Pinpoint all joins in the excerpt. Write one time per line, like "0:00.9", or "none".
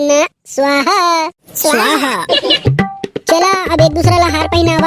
0:02.6